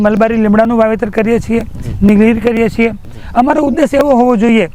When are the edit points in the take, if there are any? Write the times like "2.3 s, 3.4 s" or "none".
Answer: none